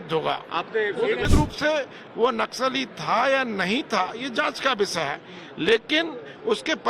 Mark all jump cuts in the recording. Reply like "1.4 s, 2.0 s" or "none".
1.3 s